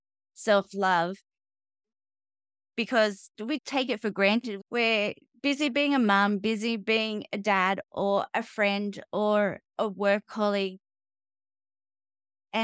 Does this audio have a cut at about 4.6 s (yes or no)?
yes